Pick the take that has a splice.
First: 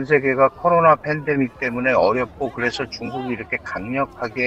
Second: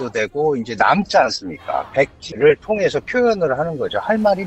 second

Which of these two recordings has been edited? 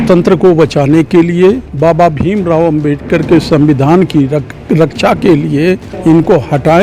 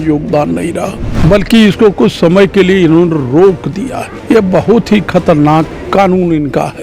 second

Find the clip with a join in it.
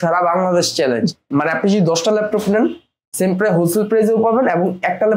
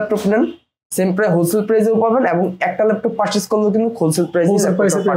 first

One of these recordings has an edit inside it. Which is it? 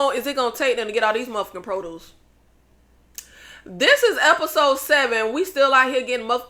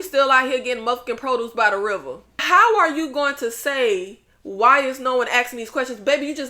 second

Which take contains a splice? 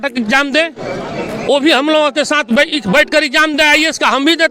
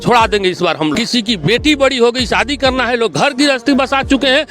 second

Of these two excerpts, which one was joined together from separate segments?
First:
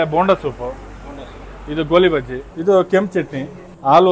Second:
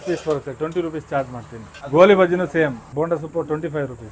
first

